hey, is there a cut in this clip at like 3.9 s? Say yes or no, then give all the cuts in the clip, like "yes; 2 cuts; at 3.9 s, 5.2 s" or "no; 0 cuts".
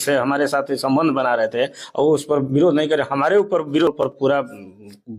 yes; 1 cut; at 3.9 s